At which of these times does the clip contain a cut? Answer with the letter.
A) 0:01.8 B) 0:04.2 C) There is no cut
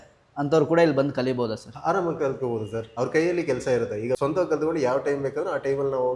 B